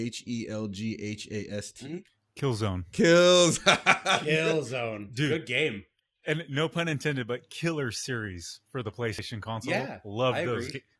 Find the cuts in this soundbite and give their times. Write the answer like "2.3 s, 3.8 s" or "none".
none